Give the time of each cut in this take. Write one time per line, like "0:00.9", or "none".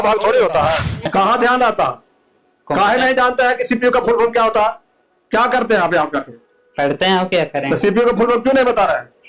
0:01.1

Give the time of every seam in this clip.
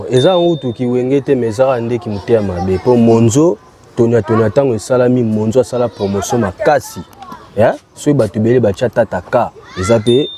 none

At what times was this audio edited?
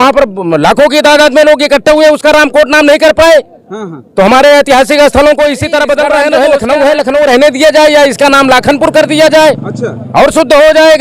0:06.5

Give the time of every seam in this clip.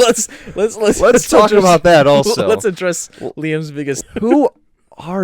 0:04.0

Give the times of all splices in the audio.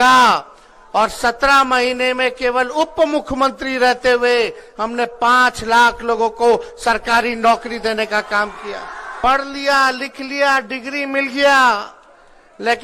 0:09.2

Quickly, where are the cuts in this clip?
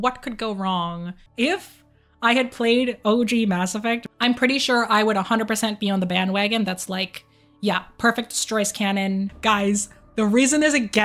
0:01.2
0:04.1
0:09.3

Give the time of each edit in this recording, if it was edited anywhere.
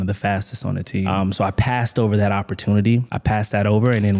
0:01.2

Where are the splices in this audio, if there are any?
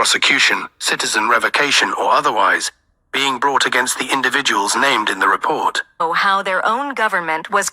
0:06.0

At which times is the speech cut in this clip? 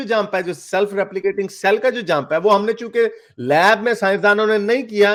none

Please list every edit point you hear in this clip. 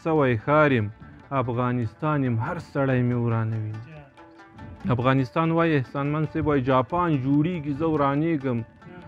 none

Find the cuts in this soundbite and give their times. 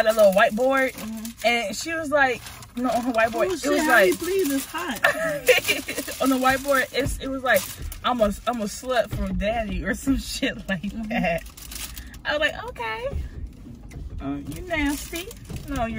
none

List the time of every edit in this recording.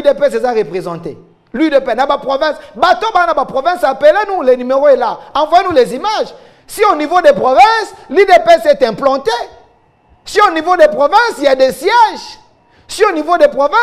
none

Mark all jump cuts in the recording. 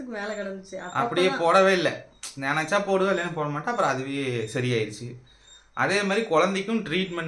none

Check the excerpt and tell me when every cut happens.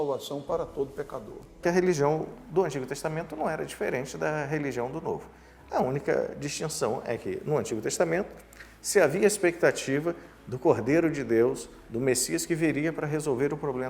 0:01.6

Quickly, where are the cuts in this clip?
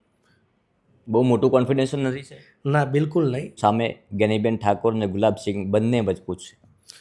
0:03.5

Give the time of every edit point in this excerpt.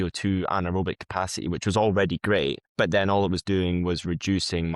0:02.6

